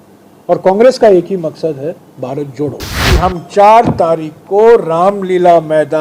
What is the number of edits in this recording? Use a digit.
1